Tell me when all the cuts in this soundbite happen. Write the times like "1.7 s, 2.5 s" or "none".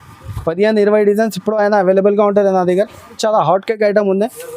3.2 s